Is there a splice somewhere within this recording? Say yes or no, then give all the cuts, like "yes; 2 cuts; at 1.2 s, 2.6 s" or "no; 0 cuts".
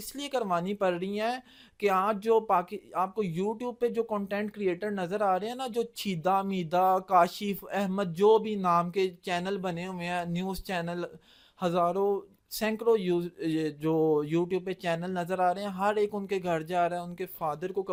no; 0 cuts